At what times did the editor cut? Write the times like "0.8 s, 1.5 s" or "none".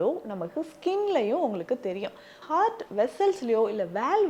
2.4 s